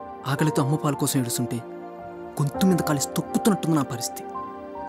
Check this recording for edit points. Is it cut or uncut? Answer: cut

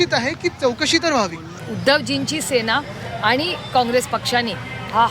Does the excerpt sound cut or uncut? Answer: uncut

